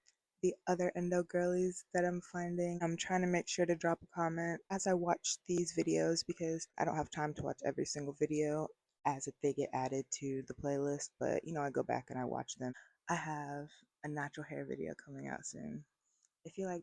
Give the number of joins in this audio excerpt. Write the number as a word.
five